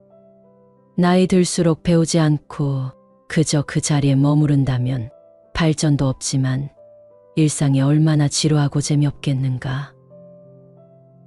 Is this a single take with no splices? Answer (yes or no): yes